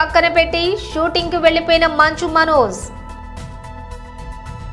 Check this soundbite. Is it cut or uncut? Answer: cut